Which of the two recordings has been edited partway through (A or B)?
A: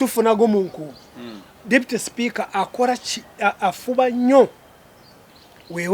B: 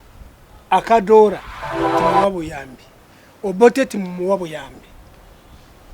B